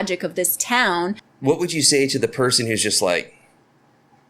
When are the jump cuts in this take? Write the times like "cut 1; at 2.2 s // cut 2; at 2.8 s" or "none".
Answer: cut 1; at 1.3 s